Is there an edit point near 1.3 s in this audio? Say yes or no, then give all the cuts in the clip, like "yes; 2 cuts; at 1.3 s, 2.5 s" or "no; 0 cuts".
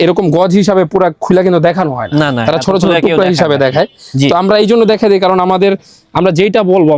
no; 0 cuts